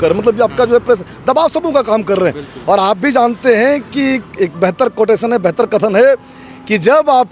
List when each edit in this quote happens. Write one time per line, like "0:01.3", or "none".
none